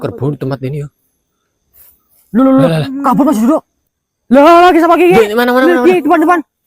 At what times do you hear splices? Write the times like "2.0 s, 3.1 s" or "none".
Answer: 3.8 s